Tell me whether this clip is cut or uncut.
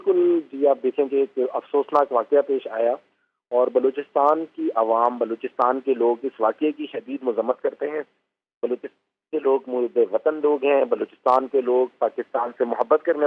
uncut